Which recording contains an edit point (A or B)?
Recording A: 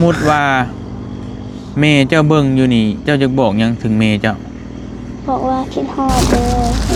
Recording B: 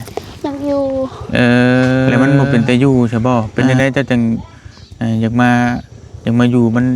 B